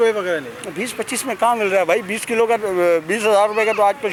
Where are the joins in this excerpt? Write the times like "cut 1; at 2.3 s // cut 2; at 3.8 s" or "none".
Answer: none